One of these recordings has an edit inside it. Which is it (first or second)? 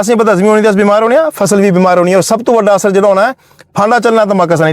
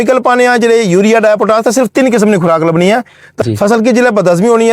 second